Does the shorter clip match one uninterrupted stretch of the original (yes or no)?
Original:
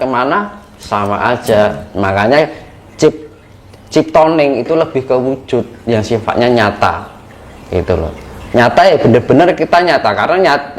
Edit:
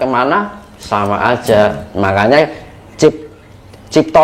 yes